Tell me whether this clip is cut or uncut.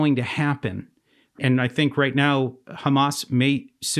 cut